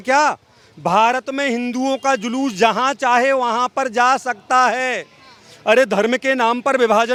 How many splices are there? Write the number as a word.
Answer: zero